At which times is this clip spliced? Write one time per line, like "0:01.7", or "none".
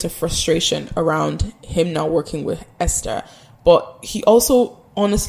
none